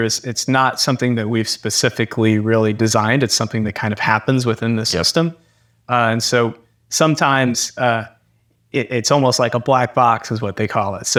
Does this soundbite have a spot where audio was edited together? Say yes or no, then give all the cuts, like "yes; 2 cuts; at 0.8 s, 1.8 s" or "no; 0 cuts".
no; 0 cuts